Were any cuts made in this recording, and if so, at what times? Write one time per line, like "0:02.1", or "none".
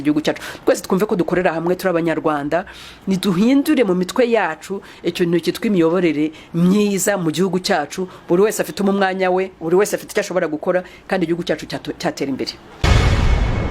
0:12.6